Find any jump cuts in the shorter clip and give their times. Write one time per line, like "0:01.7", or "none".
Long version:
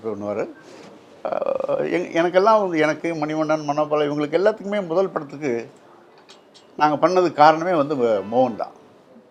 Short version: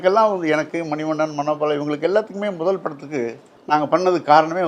0:03.5